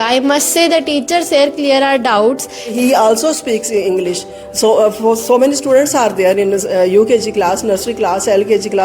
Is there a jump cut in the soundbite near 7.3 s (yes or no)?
no